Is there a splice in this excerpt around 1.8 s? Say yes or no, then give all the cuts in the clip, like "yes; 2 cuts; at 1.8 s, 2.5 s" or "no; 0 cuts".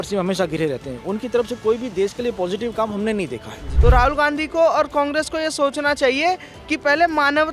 no; 1 cut; at 3.6 s